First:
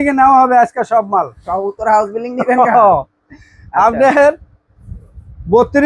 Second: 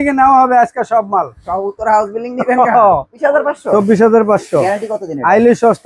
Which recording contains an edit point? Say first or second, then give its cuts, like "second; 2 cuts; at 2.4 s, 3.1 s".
second; 1 cut; at 3.1 s